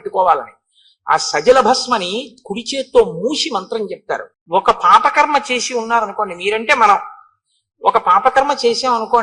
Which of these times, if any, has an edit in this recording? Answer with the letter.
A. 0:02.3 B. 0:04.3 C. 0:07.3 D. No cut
B